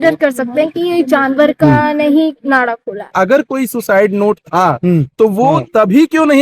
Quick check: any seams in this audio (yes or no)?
yes